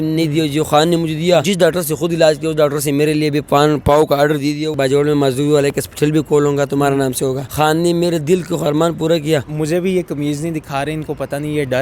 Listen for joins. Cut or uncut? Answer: cut